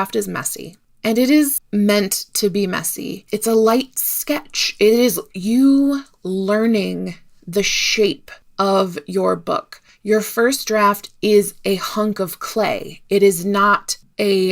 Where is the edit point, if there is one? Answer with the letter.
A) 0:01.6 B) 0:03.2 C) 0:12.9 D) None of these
B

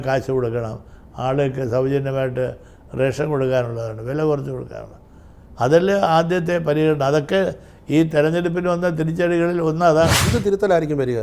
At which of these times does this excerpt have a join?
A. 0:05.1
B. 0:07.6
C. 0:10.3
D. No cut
C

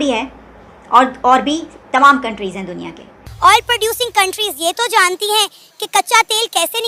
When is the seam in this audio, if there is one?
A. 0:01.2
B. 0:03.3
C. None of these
B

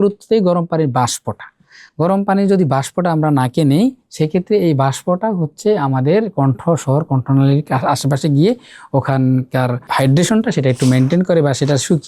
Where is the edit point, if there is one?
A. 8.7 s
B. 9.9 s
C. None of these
B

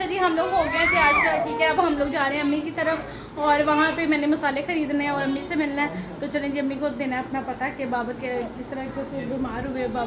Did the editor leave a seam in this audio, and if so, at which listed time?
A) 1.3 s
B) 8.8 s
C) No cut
C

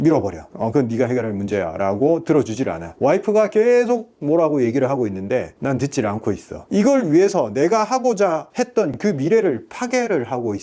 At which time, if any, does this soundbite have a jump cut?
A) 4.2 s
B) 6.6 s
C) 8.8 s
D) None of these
B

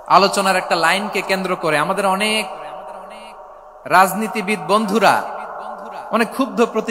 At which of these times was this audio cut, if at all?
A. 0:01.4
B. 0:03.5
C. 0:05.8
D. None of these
D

